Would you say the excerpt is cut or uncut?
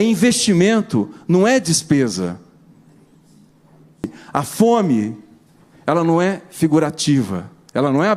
cut